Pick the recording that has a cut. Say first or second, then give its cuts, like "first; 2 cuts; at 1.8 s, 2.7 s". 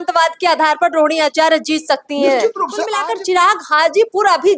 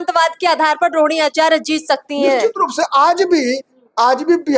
first; 1 cut; at 2.9 s